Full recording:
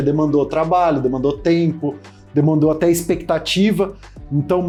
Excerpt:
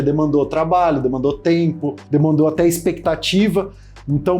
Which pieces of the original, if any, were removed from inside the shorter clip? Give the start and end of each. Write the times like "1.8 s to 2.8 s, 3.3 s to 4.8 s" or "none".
1.9 s to 2.2 s